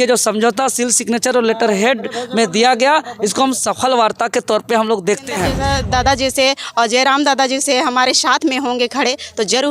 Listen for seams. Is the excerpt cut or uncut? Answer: cut